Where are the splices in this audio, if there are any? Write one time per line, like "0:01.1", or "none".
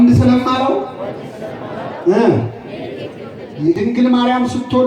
0:03.8